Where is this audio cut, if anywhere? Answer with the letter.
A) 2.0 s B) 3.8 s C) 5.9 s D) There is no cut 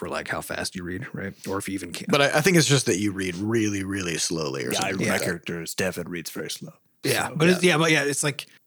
A